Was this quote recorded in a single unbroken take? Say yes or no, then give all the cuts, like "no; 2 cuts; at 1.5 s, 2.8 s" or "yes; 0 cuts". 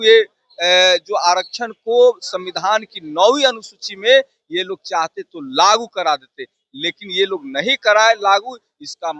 yes; 0 cuts